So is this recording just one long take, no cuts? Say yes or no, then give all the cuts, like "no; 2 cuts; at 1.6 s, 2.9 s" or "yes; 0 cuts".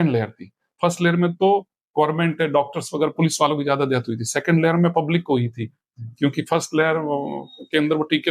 yes; 0 cuts